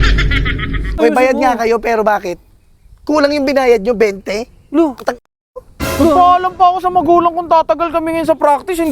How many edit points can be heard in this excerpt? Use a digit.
1